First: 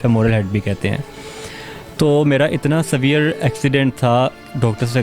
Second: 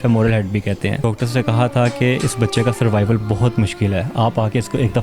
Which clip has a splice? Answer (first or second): second